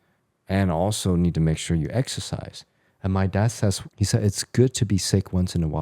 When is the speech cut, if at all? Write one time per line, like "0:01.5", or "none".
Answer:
0:03.9

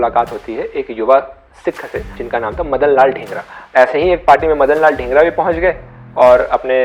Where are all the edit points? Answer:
0:03.7

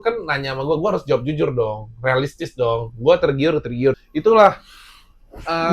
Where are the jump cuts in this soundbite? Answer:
0:04.0

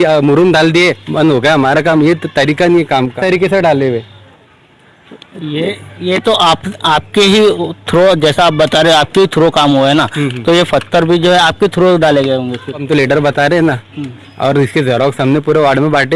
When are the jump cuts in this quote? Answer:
0:03.2
0:12.8

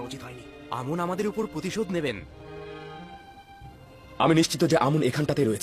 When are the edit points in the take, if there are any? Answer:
none

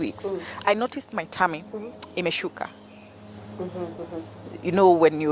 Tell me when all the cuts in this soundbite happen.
none

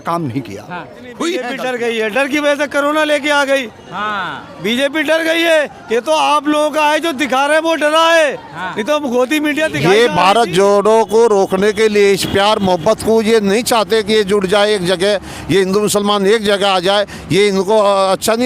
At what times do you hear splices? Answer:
0:01.5
0:09.8

